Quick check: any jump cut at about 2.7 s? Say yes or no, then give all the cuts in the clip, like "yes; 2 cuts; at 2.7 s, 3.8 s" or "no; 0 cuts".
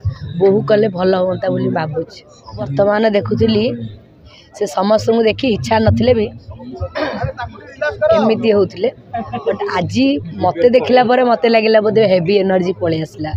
yes; 1 cut; at 2.7 s